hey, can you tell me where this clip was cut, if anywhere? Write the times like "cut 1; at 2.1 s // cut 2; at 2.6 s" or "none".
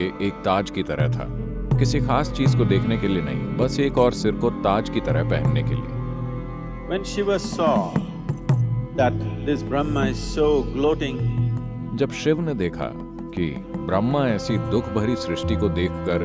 none